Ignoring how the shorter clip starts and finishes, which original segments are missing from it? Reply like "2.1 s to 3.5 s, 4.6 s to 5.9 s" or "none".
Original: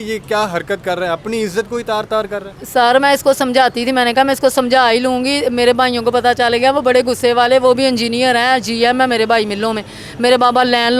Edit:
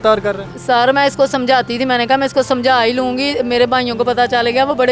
none

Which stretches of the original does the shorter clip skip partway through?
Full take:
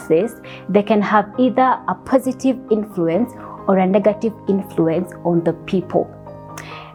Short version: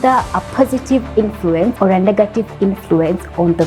3.3 s to 3.6 s

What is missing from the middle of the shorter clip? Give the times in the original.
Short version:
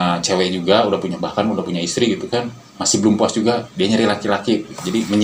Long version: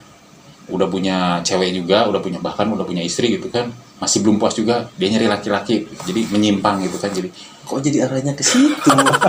none

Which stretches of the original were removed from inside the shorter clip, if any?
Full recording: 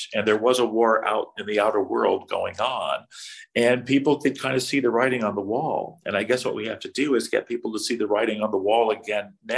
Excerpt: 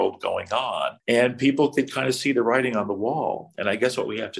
3.0 s to 3.4 s

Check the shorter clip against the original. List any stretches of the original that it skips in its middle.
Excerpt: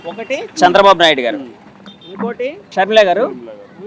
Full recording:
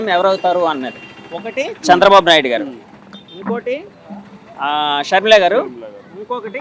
4.0 s to 5.1 s

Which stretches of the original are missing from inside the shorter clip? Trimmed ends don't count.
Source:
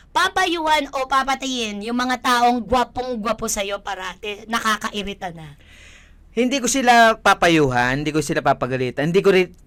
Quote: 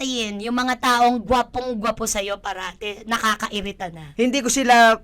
5.4 s to 6.2 s

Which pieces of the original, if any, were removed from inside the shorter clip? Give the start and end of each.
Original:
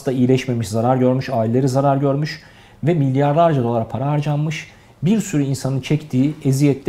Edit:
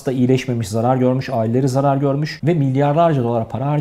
2.3 s to 2.7 s

